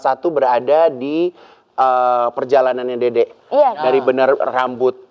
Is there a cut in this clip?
no; 0 cuts

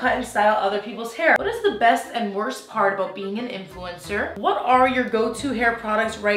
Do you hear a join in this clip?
yes; 2 cuts; at 1.4 s, 4.3 s

